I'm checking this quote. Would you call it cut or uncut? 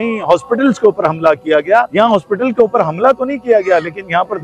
cut